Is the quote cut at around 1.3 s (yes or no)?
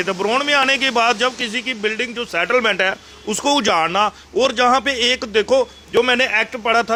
no